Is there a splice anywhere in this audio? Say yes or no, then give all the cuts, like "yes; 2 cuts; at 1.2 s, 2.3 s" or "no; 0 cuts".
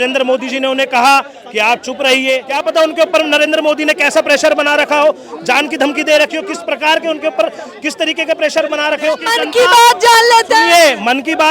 yes; 2 cuts; at 2.5 s, 9.3 s